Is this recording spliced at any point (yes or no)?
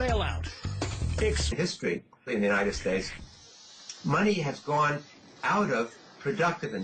no